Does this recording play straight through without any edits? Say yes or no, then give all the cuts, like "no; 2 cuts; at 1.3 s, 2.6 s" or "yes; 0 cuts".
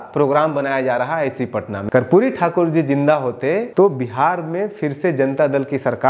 no; 2 cuts; at 1.7 s, 3.7 s